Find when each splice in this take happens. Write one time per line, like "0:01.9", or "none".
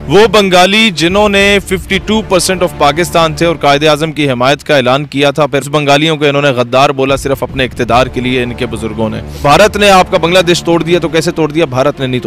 0:05.7
0:09.4